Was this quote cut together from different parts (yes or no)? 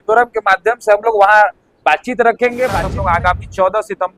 yes